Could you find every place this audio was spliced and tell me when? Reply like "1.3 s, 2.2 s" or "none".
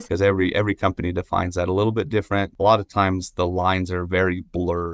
2.5 s